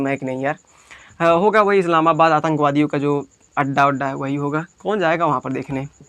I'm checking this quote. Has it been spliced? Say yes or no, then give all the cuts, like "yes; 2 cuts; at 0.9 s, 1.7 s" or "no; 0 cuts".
no; 0 cuts